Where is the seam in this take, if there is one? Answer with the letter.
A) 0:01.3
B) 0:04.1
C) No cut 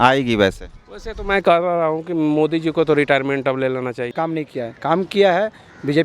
B